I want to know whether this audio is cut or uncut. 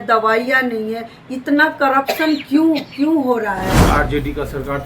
cut